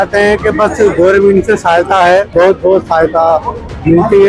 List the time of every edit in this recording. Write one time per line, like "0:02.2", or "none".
0:02.3